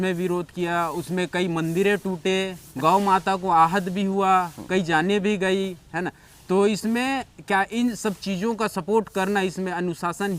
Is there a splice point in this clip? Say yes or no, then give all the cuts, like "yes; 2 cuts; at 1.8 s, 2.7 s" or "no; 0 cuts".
yes; 1 cut; at 2.6 s